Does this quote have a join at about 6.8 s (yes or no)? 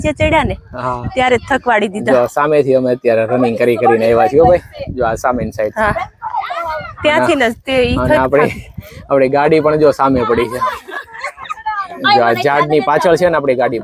no